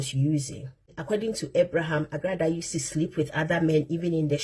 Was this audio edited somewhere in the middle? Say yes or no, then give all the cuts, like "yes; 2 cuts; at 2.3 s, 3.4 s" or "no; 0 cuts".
yes; 1 cut; at 0.9 s